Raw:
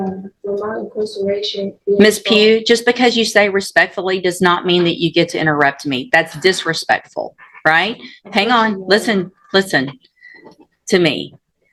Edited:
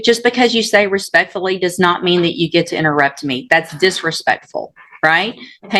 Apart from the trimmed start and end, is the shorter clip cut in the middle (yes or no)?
no